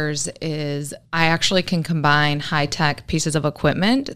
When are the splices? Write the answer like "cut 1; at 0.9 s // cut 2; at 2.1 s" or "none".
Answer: cut 1; at 1.0 s